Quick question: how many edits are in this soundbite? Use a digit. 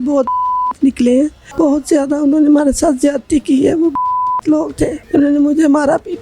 2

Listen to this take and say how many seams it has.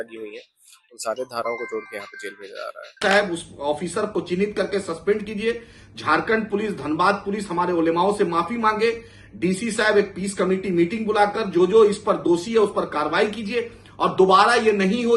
1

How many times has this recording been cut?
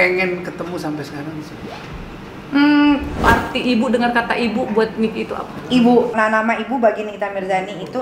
2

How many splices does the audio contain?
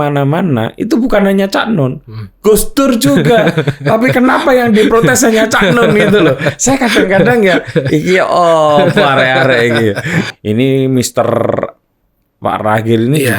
1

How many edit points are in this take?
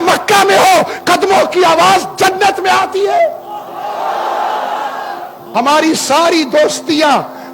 1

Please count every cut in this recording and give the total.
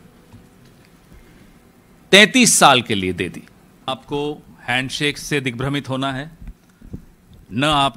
1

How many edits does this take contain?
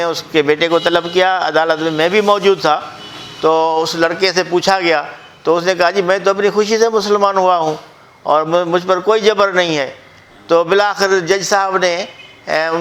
0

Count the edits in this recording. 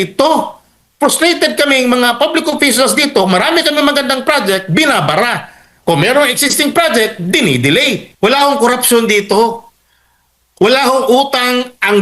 1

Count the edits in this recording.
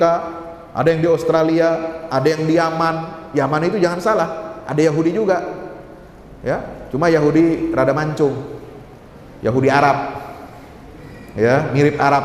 0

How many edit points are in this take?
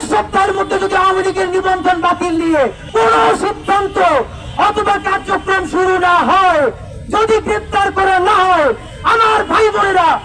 1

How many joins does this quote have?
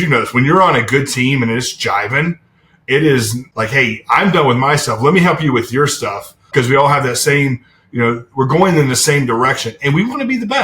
2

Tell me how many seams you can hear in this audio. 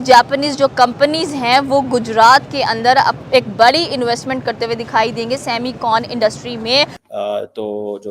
1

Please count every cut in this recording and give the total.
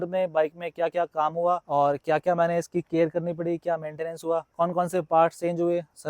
2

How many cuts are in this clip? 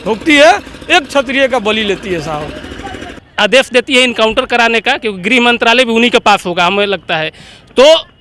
1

